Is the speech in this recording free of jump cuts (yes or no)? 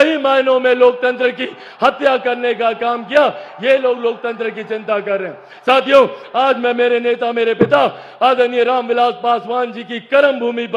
yes